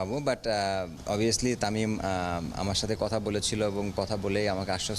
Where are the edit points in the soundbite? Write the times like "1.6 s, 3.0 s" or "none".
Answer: 1.0 s